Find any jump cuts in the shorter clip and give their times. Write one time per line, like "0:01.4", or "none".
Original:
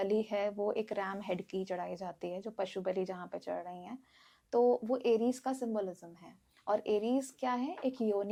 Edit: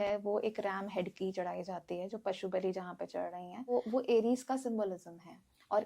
0:03.7